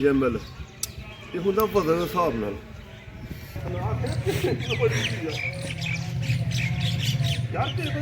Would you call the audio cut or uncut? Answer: cut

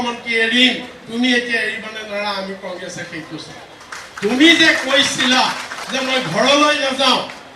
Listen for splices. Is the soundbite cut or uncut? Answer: uncut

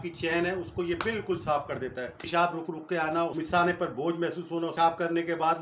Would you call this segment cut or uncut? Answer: cut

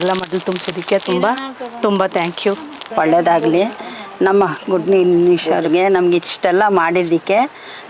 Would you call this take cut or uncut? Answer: uncut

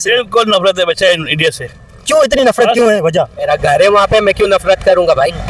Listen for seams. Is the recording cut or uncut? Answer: cut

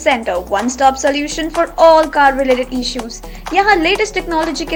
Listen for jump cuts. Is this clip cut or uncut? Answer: uncut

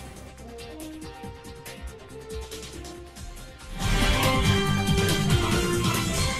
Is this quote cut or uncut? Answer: uncut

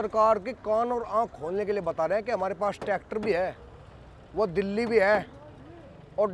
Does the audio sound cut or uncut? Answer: uncut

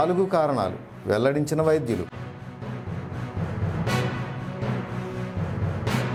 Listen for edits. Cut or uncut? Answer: uncut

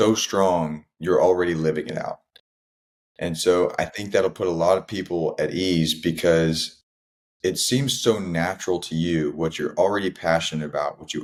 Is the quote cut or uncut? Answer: uncut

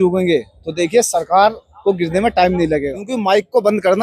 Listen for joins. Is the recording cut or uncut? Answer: cut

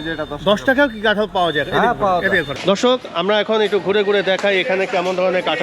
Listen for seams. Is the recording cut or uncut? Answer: cut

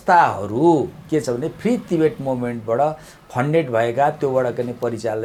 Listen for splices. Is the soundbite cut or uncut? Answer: uncut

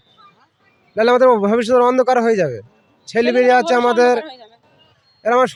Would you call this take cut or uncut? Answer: uncut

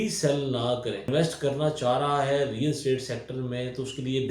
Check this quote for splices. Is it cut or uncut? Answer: cut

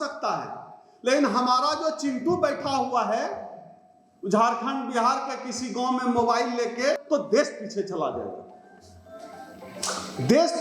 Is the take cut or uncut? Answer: cut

